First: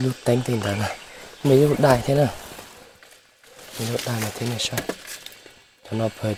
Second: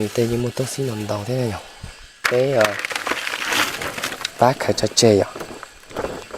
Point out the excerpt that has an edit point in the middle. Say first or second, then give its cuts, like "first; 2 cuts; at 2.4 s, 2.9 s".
second; 1 cut; at 2.2 s